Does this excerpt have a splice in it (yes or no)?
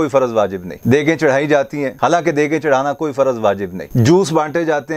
no